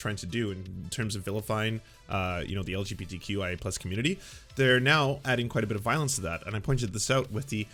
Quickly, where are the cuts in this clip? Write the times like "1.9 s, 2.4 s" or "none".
none